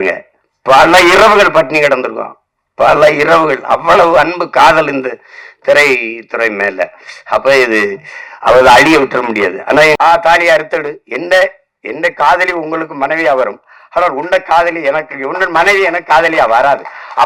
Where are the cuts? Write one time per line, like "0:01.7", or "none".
0:10.0